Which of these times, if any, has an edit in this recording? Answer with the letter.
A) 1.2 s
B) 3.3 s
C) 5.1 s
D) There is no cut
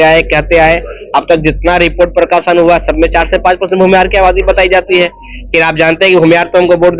D